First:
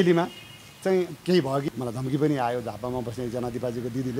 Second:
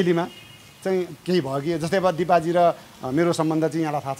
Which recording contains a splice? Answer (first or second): first